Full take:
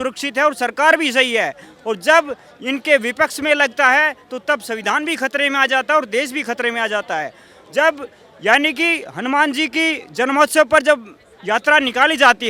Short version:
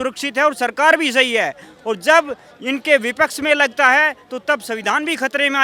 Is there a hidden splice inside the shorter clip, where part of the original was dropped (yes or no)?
no